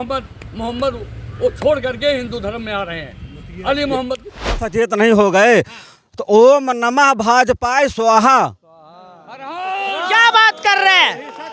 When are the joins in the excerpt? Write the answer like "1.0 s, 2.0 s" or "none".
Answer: 4.6 s